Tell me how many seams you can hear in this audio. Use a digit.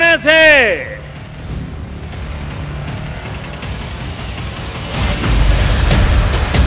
1